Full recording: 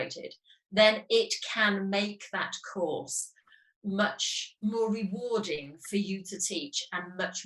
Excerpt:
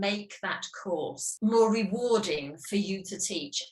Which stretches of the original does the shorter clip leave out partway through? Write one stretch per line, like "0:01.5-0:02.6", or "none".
0:03.1-0:04.4